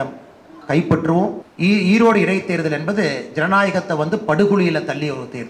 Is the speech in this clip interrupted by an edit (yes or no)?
yes